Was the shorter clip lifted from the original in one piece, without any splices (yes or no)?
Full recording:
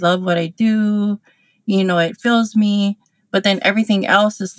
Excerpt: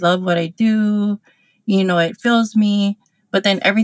yes